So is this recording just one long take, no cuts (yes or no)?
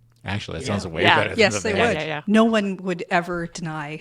no